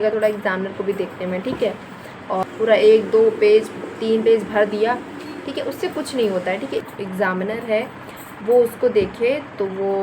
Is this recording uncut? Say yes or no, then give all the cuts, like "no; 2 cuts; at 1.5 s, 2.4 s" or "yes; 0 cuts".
no; 2 cuts; at 2.4 s, 6.9 s